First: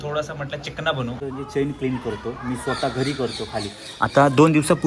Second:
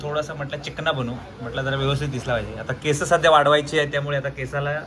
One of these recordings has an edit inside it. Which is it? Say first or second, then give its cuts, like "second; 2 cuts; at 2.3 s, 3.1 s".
first; 1 cut; at 1.2 s